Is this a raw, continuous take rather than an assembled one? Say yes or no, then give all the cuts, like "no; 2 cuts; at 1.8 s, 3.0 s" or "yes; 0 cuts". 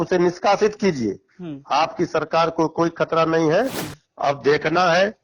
no; 1 cut; at 3.8 s